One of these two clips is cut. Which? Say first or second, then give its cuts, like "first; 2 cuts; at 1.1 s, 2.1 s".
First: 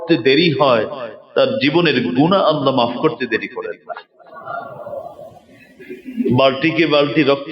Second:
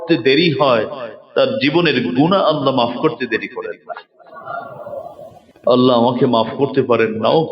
second; 1 cut; at 5.4 s